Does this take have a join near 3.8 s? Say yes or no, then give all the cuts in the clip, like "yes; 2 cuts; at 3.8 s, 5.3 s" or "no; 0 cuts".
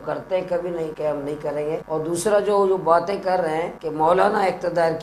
yes; 3 cuts; at 0.9 s, 1.8 s, 3.8 s